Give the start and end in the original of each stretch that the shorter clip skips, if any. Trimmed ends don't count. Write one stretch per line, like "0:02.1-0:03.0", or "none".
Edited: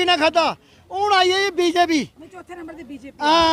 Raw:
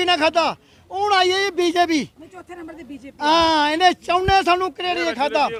none